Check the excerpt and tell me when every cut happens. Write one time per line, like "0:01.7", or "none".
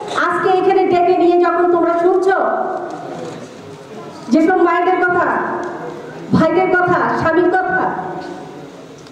none